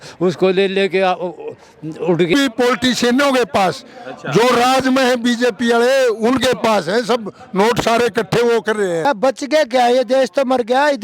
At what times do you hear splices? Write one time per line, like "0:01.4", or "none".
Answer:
0:02.3
0:09.0